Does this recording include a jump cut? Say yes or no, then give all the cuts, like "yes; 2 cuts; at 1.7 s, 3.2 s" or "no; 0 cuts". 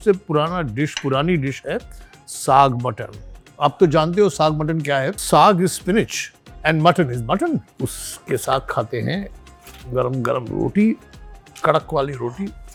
no; 0 cuts